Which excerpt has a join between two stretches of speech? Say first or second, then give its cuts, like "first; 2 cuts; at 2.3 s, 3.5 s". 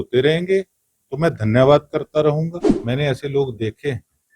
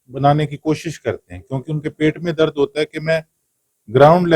first; 1 cut; at 2.7 s